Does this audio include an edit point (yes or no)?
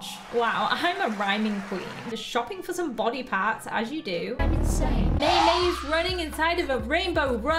yes